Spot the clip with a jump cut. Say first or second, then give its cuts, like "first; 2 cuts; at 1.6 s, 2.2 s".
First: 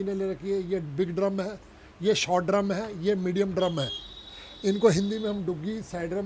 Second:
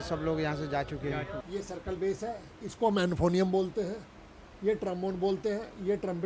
second; 1 cut; at 1.4 s